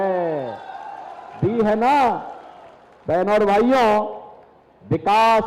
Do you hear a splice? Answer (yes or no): no